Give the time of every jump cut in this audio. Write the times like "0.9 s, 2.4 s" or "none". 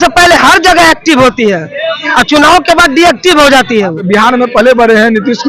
4.0 s